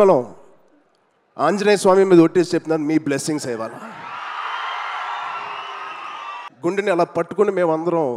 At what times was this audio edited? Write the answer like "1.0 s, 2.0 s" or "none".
6.4 s